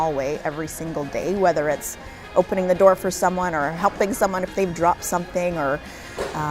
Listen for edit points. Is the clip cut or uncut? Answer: uncut